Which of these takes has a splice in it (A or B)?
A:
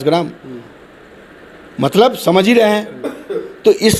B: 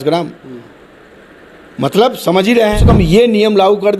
B